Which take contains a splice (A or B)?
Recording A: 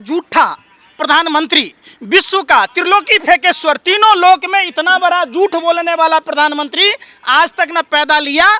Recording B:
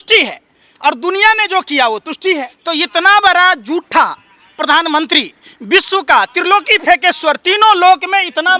B